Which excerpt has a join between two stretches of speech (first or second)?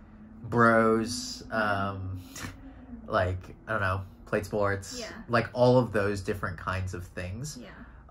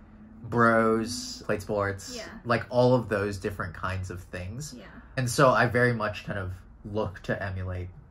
second